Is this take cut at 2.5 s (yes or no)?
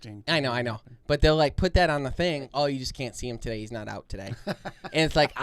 yes